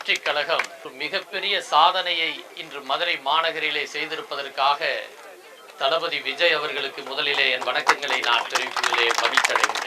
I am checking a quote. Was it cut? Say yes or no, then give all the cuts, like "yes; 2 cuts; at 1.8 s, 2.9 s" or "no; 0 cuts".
yes; 1 cut; at 0.9 s